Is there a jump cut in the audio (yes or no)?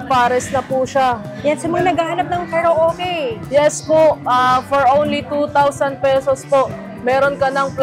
yes